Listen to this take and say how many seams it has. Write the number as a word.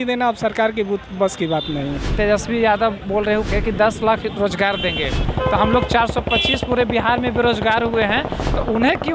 three